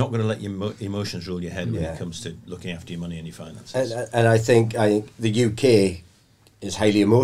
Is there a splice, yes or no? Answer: no